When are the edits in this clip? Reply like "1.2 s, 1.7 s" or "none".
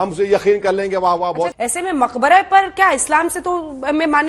1.5 s